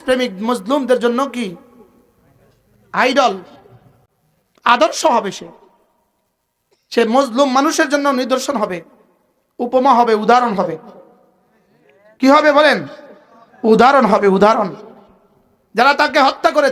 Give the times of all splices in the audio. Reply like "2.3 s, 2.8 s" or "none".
none

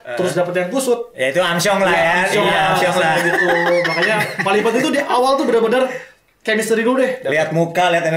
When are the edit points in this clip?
1.1 s

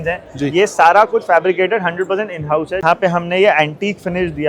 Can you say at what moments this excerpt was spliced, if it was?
2.8 s

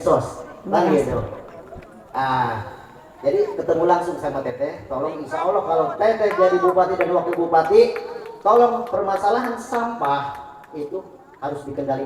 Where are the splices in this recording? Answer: none

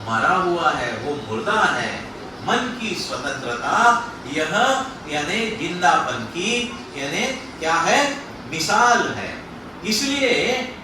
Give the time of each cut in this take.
none

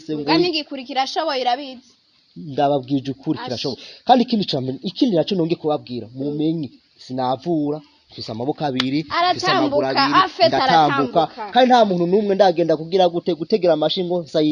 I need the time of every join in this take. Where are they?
none

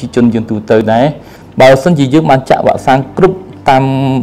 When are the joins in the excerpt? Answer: 0.9 s

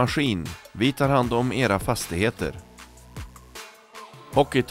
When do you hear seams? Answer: none

